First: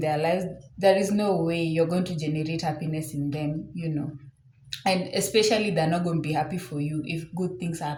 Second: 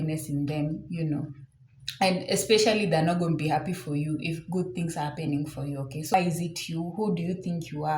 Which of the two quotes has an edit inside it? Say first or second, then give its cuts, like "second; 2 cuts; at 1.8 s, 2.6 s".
second; 1 cut; at 6.1 s